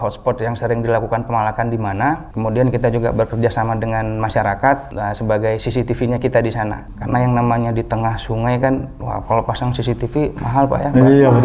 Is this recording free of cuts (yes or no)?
no